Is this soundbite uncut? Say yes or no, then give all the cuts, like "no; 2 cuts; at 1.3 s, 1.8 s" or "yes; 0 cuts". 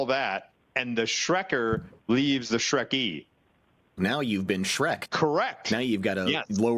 no; 2 cuts; at 3.9 s, 5.1 s